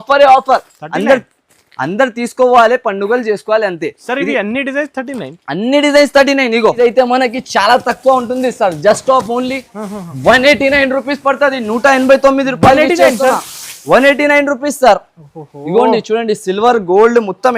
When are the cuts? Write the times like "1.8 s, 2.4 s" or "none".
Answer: 6.8 s